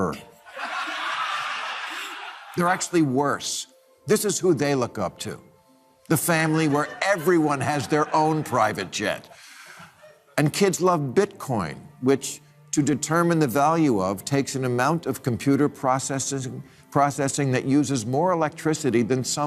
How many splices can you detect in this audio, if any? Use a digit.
0